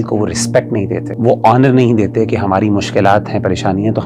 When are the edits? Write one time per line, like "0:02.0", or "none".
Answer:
0:01.1

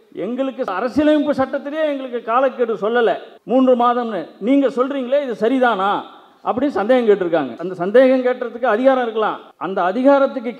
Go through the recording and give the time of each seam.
0:07.6

